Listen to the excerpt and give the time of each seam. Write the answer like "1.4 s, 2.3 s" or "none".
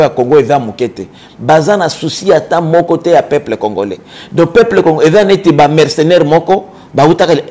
none